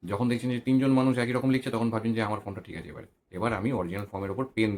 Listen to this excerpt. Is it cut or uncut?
uncut